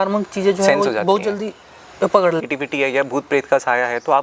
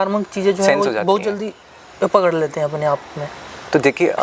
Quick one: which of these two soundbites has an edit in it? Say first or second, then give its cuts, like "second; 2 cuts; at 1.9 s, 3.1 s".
first; 1 cut; at 2.4 s